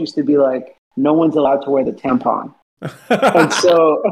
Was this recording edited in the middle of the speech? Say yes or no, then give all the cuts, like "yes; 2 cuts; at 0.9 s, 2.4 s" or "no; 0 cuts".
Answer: no; 0 cuts